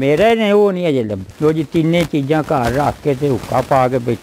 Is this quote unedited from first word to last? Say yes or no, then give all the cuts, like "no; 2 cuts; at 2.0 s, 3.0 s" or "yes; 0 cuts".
yes; 0 cuts